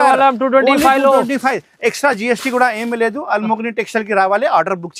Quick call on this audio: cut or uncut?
uncut